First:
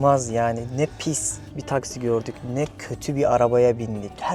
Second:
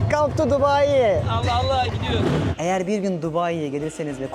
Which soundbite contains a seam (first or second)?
second